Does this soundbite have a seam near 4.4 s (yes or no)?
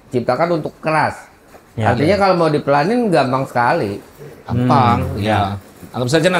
no